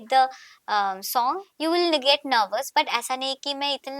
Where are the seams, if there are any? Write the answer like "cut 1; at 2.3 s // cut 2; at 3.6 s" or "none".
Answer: cut 1; at 1.5 s